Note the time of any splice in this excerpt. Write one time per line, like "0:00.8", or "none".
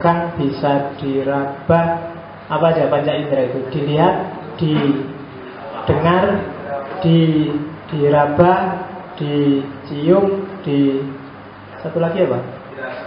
0:07.8